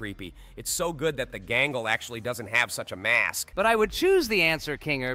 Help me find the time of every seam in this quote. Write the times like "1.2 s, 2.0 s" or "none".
3.4 s